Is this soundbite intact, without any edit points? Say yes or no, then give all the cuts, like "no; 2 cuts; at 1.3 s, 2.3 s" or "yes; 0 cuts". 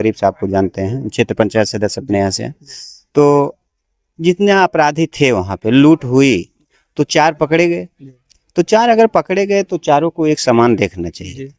yes; 0 cuts